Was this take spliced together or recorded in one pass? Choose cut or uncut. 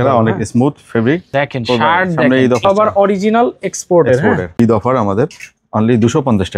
cut